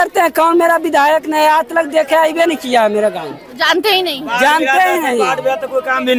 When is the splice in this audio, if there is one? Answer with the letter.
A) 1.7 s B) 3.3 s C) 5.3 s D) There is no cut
D